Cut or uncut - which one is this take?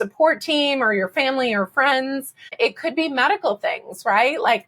cut